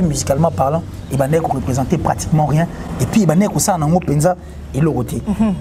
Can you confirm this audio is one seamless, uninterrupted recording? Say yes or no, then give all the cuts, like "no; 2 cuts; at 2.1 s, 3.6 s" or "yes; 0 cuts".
yes; 0 cuts